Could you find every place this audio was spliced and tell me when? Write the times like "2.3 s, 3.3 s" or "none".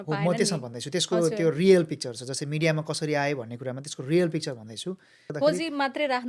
5.3 s